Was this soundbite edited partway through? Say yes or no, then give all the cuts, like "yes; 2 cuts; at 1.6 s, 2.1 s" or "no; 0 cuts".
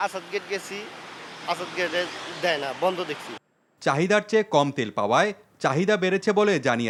no; 0 cuts